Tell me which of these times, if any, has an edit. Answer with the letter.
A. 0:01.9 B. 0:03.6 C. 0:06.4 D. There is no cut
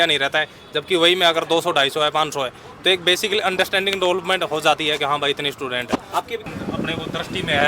C